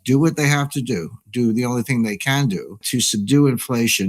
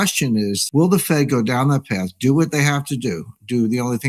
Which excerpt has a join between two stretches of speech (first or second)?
first